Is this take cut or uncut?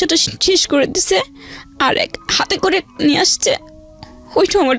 uncut